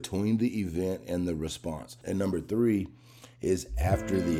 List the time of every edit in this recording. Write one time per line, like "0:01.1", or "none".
0:02.0